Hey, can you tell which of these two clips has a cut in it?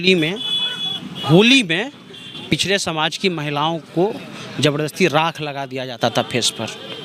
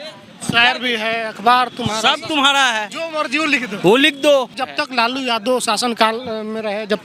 second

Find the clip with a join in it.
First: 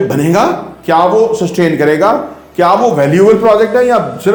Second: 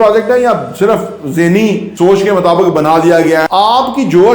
second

